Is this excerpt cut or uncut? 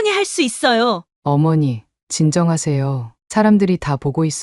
cut